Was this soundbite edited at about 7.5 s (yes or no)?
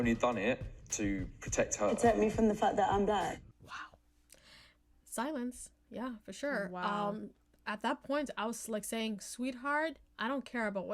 no